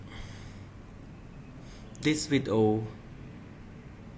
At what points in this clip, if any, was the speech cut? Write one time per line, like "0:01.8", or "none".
0:00.9